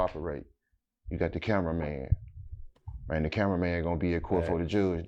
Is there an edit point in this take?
no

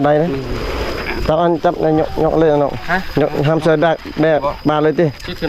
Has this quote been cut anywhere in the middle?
no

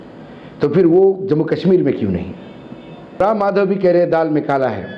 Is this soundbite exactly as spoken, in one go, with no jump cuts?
no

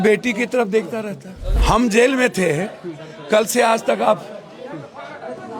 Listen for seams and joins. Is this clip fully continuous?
no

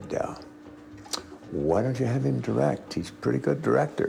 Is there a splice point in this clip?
no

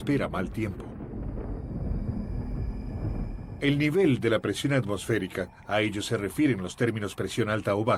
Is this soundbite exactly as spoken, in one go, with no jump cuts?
no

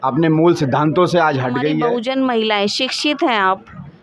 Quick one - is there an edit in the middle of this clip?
yes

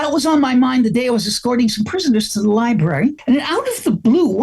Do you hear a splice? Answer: yes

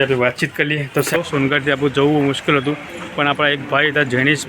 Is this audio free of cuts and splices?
no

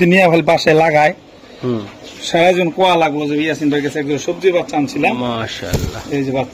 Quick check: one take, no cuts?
yes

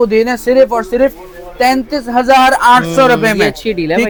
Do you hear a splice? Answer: no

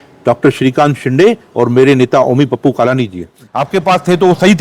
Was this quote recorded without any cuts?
no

